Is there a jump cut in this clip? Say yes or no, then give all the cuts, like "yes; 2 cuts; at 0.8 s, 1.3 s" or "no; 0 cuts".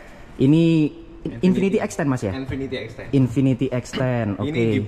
no; 0 cuts